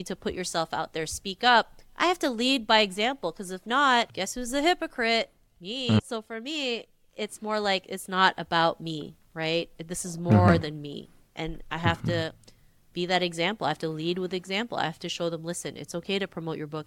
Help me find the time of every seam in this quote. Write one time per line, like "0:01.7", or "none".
0:04.1